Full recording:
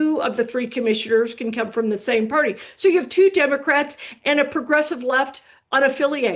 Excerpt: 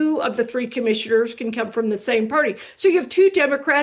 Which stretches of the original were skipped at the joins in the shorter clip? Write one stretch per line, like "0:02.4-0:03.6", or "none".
none